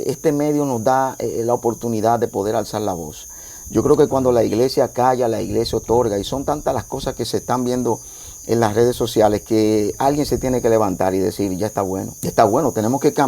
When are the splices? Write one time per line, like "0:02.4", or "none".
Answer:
0:12.1